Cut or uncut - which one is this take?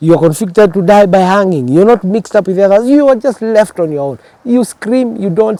uncut